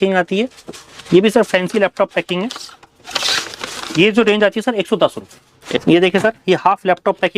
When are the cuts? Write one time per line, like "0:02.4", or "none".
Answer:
0:05.8